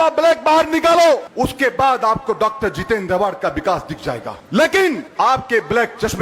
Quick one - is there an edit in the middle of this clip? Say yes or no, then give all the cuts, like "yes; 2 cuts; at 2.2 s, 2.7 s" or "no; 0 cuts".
yes; 3 cuts; at 1.3 s, 4.3 s, 5.1 s